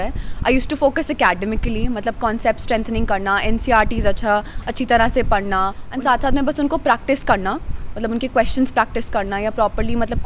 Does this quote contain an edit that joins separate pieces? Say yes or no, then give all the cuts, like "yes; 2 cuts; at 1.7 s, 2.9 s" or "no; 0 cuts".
yes; 1 cut; at 5.8 s